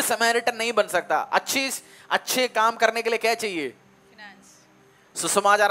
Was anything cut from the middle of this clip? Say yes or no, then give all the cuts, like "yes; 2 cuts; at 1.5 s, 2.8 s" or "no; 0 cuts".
no; 0 cuts